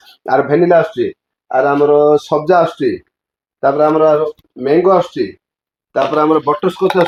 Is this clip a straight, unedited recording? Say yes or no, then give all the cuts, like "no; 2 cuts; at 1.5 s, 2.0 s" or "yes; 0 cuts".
yes; 0 cuts